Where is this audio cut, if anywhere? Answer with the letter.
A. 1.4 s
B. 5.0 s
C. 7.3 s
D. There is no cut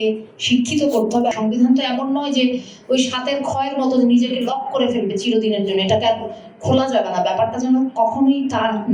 A